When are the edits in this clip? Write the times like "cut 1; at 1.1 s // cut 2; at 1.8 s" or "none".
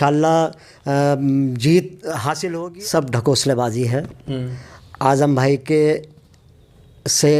cut 1; at 2.3 s